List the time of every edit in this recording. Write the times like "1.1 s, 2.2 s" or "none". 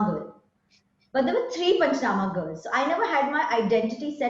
none